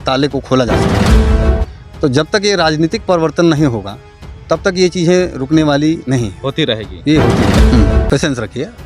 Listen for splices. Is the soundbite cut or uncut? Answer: cut